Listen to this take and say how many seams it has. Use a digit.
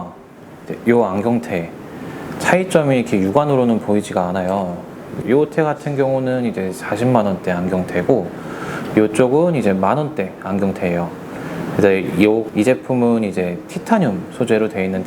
2